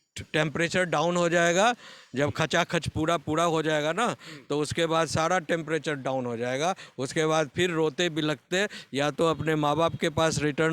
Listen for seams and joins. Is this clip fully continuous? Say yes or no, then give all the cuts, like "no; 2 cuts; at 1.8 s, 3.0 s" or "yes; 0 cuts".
yes; 0 cuts